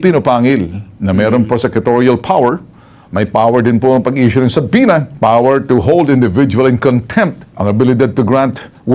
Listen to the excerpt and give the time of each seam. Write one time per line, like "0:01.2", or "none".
0:05.1